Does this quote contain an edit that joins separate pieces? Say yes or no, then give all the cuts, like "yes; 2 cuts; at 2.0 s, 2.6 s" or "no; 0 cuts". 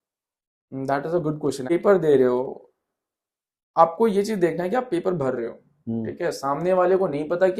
yes; 1 cut; at 1.7 s